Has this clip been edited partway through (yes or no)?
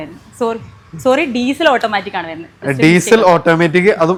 no